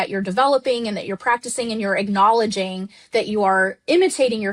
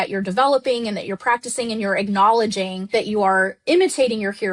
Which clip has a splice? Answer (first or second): second